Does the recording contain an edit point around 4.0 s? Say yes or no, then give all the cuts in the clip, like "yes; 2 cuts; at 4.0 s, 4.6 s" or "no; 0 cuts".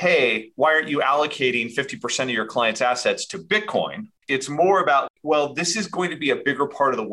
yes; 2 cuts; at 4.0 s, 5.1 s